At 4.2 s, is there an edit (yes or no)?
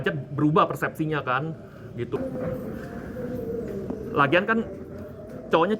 no